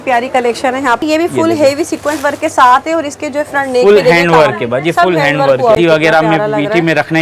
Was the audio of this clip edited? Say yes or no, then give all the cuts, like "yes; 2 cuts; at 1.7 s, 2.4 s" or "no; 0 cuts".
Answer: yes; 2 cuts; at 1.0 s, 5.8 s